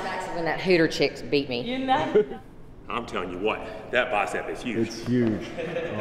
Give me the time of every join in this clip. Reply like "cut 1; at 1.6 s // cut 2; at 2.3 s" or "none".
cut 1; at 2.3 s